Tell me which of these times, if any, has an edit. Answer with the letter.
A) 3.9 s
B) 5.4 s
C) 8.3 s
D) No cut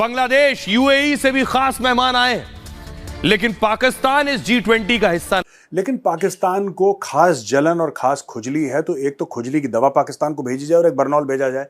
B